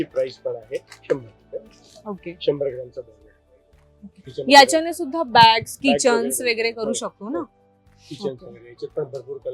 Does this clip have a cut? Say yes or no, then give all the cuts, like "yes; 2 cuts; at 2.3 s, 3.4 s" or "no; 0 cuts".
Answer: no; 0 cuts